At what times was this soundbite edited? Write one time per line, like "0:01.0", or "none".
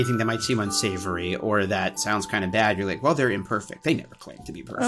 0:02.0